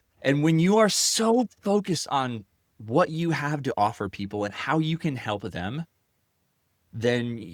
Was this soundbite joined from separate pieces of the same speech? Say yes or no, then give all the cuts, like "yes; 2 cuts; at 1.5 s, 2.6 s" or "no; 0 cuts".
no; 0 cuts